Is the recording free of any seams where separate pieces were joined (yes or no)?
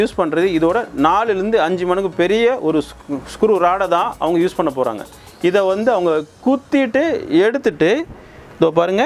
yes